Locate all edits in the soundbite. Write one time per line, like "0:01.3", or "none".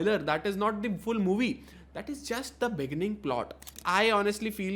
0:03.8